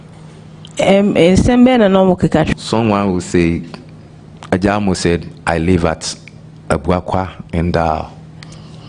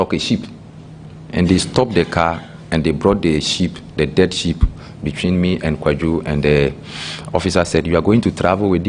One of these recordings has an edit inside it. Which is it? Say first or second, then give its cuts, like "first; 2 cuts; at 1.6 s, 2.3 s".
first; 1 cut; at 2.5 s